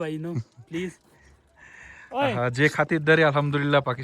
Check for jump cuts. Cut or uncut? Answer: uncut